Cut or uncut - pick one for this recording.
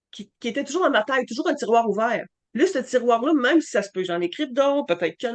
cut